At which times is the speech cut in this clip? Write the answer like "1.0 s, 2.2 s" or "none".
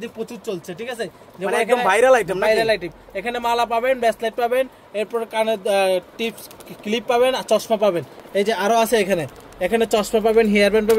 none